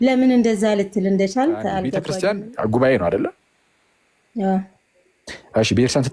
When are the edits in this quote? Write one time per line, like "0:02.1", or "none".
0:02.0